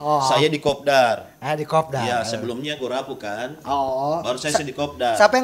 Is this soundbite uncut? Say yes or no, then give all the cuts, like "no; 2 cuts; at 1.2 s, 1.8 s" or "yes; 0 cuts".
yes; 0 cuts